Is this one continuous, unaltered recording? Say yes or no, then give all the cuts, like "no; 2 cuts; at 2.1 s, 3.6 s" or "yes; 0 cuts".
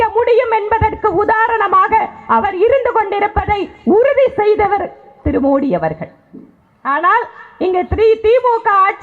yes; 0 cuts